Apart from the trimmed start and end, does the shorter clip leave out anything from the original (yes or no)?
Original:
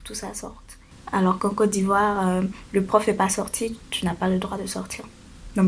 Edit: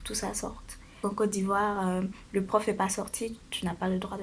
yes